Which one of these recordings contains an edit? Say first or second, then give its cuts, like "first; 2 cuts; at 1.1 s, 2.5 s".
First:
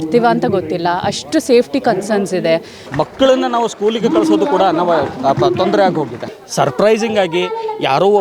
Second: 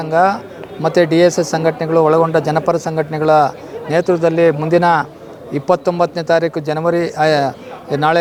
first; 2 cuts; at 2.8 s, 6.2 s